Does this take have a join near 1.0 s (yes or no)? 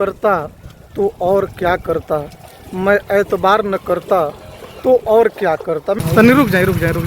no